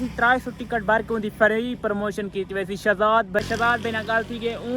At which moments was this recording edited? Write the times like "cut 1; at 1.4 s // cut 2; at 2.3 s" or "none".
cut 1; at 3.4 s

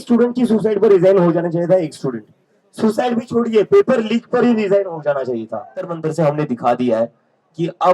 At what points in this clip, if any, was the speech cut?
cut 1; at 5.9 s

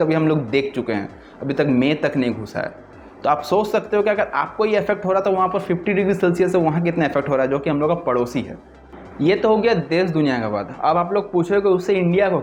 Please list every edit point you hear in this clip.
none

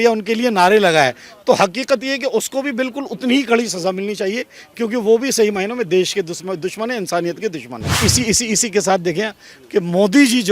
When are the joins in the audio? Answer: cut 1; at 8.0 s

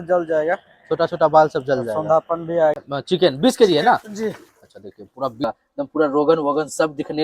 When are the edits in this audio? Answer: cut 1; at 2.8 s // cut 2; at 5.4 s

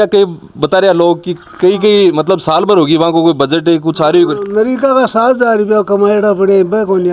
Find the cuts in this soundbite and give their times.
none

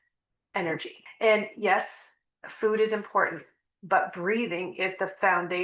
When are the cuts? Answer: cut 1; at 1.0 s

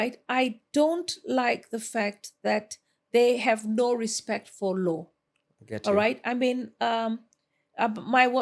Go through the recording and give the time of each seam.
none

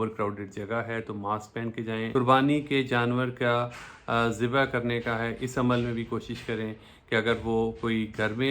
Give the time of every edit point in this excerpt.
cut 1; at 2.1 s

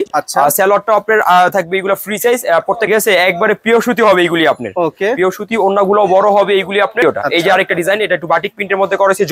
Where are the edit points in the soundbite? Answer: cut 1; at 2.9 s // cut 2; at 7.0 s

